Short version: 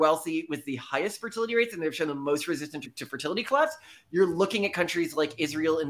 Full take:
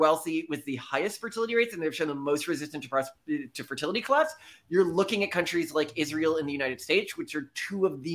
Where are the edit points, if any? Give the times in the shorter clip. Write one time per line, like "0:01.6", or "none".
0:02.9

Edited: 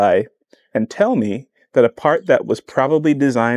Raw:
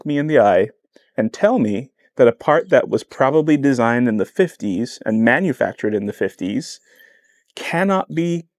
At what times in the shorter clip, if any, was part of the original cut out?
none

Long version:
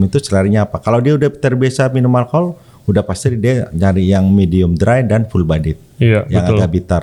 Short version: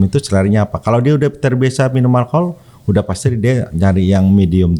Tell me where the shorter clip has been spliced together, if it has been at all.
none

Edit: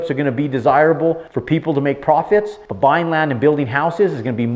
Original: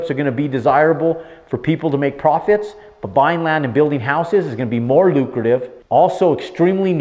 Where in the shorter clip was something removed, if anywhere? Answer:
0:01.3
0:02.6

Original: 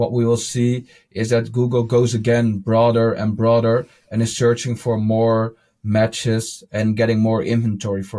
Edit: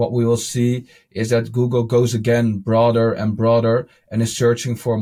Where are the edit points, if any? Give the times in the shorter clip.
none

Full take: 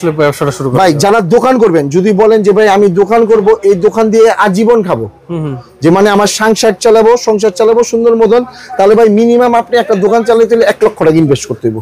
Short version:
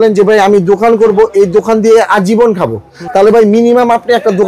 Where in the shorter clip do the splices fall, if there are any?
0:03.0

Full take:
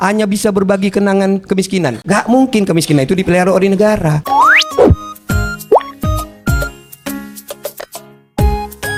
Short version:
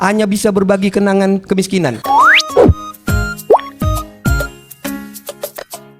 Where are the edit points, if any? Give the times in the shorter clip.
0:02.0

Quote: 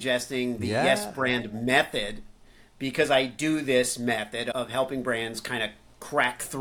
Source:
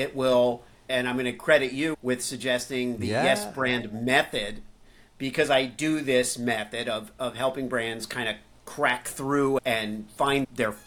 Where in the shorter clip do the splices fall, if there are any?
0:04.5

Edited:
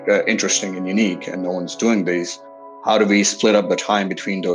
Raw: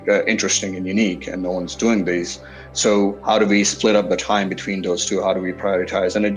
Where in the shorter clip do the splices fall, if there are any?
0:02.8

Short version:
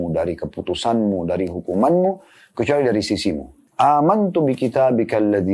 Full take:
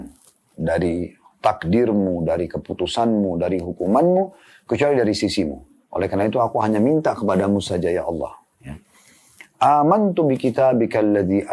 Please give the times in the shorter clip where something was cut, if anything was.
0:03.5

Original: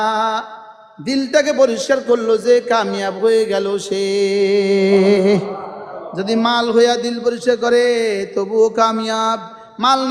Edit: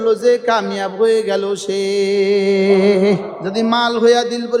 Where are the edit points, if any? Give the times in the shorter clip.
0:03.4

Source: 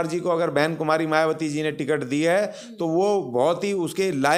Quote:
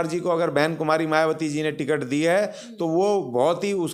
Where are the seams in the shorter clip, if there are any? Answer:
none

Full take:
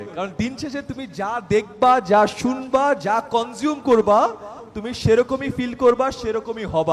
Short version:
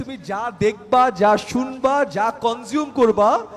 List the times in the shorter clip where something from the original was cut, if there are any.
none

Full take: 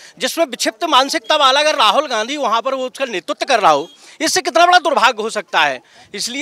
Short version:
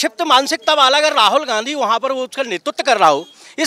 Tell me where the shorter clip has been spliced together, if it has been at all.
none

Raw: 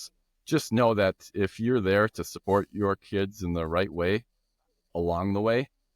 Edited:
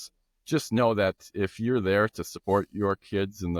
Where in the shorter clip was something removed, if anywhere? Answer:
none

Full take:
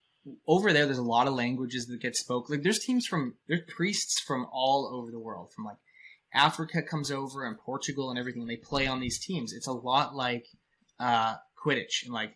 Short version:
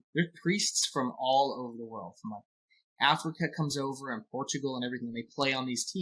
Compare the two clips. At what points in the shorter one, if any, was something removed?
none

